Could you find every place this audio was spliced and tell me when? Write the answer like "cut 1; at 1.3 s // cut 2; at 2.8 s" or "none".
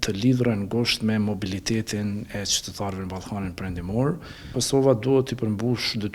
cut 1; at 4.6 s